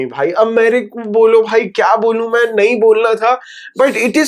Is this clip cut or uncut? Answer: uncut